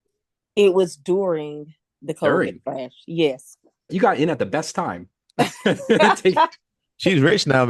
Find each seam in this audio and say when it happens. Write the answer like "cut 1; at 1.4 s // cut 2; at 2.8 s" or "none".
cut 1; at 3.9 s

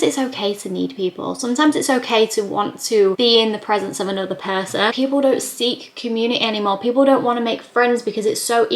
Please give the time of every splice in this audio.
cut 1; at 4.9 s

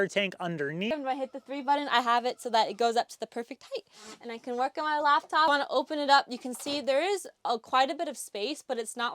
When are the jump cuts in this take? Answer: cut 1; at 0.9 s // cut 2; at 5.5 s

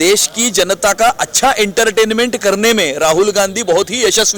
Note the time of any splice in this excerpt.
none

